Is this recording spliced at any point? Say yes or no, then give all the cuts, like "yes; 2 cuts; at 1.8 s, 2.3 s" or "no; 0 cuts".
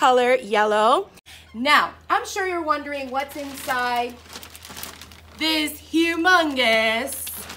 yes; 1 cut; at 1.3 s